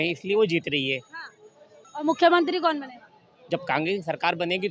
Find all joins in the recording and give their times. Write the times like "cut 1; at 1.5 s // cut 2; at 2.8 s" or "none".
none